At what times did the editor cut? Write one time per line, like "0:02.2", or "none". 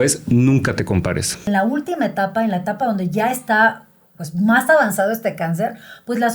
0:01.5